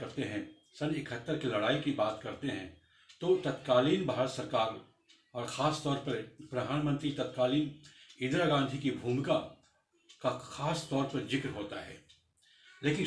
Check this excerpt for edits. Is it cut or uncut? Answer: uncut